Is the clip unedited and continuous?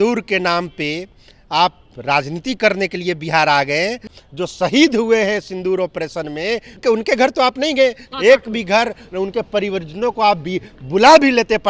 no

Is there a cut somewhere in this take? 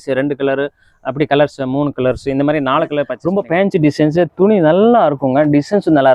yes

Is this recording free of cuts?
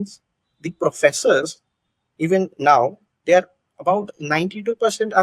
yes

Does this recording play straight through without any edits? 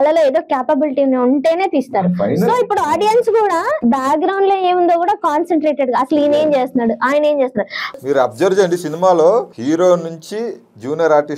no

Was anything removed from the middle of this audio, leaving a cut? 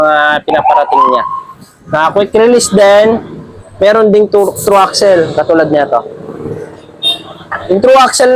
no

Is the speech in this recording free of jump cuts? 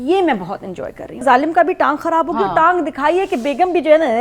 no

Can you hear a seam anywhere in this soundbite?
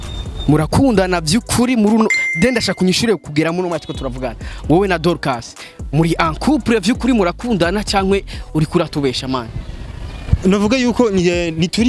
no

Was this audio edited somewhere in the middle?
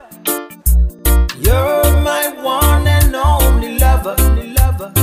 yes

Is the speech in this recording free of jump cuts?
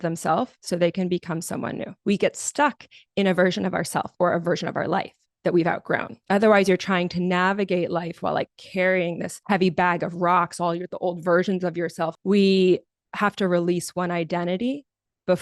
no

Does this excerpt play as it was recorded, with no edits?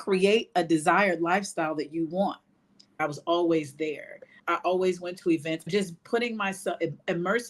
no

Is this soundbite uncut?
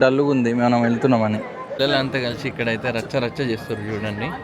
no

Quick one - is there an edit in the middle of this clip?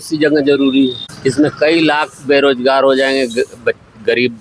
yes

